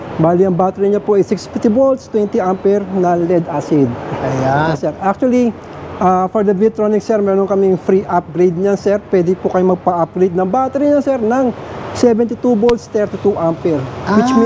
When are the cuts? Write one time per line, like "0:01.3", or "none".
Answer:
0:04.8

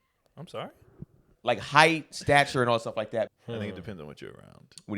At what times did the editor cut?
0:01.3
0:03.3

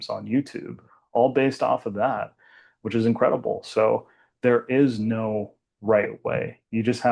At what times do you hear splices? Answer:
none

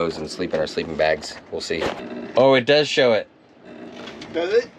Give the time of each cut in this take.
0:02.1

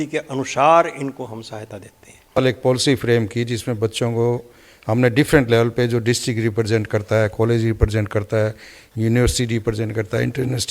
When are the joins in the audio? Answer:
0:02.4

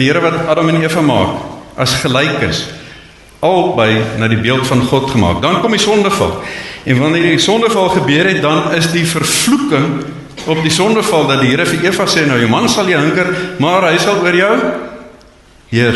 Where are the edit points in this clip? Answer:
none

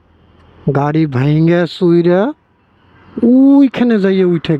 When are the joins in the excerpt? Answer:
none

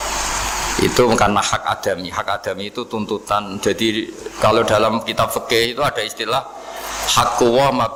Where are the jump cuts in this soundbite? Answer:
none

